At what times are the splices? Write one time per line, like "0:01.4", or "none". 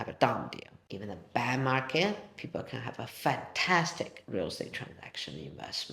none